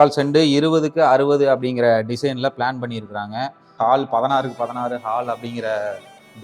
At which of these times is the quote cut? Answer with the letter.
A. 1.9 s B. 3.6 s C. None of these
B